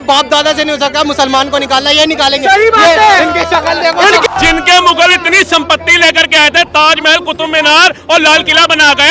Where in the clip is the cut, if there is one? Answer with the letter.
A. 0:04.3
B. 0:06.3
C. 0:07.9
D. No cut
A